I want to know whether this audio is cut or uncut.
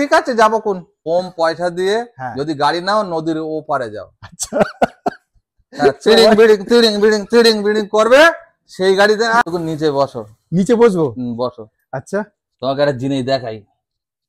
cut